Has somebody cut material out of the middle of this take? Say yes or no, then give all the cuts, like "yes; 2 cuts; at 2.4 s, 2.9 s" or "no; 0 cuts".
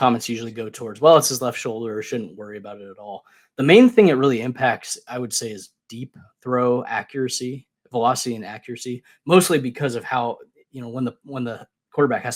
no; 0 cuts